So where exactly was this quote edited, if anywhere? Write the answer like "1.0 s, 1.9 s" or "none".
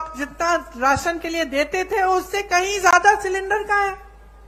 none